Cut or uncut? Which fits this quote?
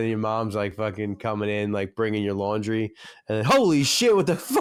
uncut